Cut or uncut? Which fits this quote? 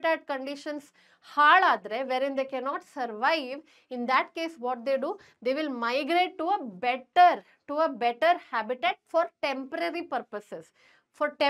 uncut